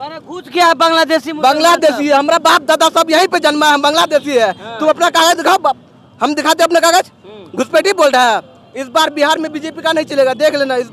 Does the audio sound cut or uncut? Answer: uncut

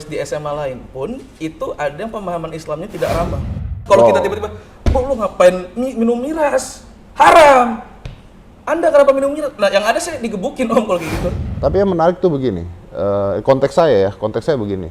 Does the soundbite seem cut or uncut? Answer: cut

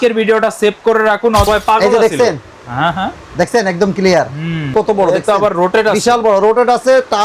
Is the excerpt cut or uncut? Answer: cut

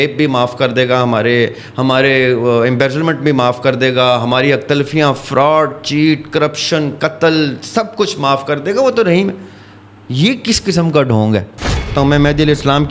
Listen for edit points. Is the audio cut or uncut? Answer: cut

